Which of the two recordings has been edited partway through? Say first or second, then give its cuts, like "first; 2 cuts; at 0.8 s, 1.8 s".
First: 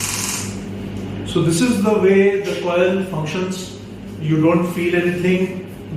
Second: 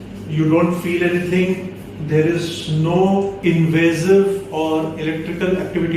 second; 1 cut; at 3.4 s